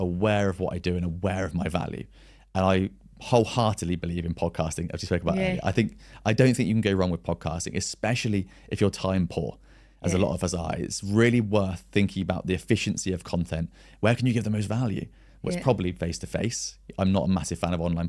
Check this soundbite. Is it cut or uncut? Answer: uncut